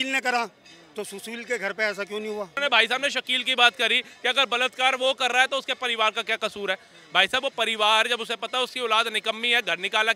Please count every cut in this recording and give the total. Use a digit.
1